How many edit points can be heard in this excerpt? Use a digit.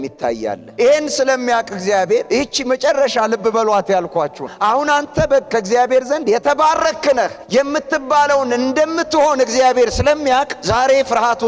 0